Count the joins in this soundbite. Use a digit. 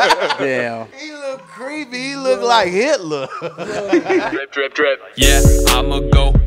1